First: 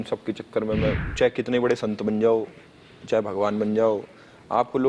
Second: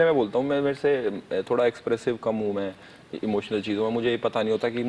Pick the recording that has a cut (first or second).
first